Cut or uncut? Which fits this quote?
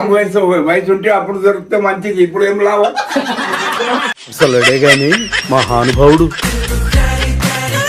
uncut